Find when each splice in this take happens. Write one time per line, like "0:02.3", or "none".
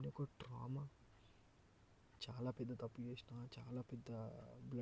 0:02.2

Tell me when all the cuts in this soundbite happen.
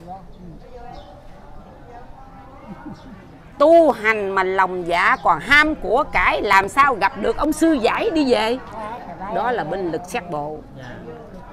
none

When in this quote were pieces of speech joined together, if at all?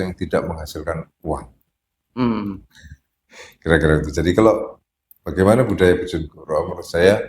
none

